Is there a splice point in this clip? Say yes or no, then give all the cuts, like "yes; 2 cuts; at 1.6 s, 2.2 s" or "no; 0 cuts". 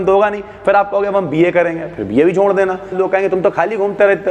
yes; 1 cut; at 2.9 s